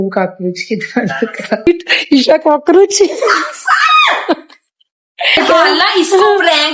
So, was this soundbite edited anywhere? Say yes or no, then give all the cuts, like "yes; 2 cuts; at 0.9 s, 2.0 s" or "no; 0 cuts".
yes; 2 cuts; at 1.7 s, 5.4 s